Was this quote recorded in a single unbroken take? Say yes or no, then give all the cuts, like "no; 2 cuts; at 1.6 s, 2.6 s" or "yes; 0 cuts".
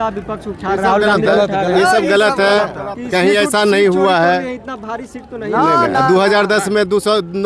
yes; 0 cuts